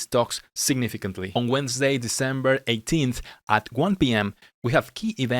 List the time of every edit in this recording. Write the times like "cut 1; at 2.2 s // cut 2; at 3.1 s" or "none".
none